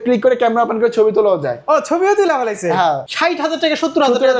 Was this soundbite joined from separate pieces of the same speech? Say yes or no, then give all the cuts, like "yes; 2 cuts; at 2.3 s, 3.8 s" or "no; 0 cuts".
yes; 1 cut; at 3.1 s